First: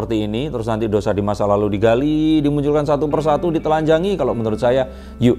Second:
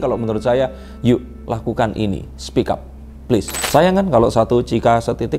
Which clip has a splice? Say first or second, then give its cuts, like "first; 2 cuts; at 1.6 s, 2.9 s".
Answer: second; 1 cut; at 3.6 s